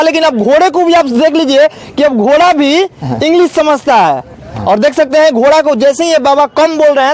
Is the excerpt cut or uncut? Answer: uncut